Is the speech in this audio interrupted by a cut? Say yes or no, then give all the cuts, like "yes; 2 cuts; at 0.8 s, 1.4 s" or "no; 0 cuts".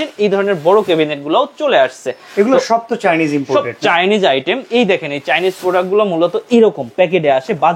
no; 0 cuts